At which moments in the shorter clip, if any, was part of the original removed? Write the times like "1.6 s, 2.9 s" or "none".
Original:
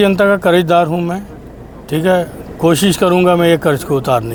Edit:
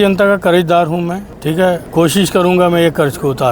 1.7 s

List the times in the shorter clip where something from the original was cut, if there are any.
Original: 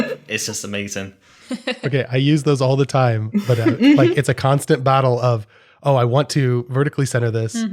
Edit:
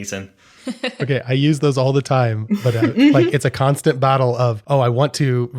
4.6 s

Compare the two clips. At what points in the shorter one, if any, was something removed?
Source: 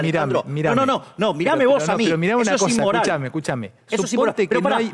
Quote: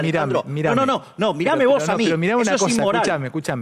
none

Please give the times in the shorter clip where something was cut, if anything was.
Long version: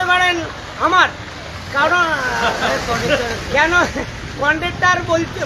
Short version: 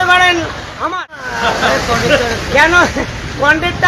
1.3 s

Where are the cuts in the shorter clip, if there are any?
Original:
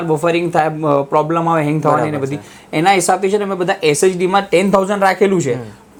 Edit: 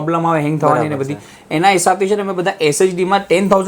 none

